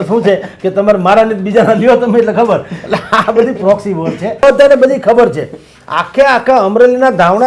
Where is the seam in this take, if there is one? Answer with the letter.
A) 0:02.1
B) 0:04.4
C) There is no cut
B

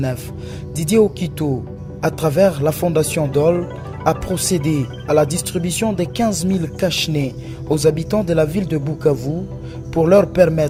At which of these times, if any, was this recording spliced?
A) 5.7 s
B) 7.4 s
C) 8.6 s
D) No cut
D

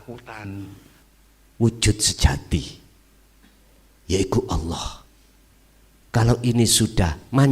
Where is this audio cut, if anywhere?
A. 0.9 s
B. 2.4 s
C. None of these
A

